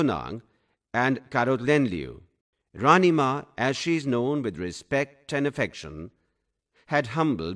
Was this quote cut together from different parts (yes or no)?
no